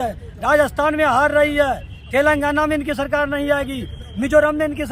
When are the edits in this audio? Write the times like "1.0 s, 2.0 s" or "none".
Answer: none